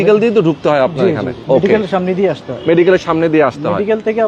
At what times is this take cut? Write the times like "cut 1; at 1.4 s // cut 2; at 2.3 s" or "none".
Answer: none